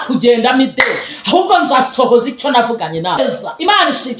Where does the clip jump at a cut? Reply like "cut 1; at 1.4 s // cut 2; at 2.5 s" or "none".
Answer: cut 1; at 3.2 s